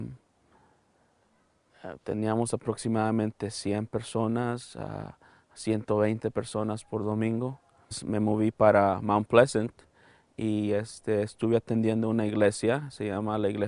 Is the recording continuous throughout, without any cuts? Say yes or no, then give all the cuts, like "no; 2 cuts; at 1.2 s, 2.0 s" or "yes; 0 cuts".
yes; 0 cuts